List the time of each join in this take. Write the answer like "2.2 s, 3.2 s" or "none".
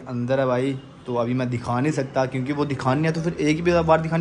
none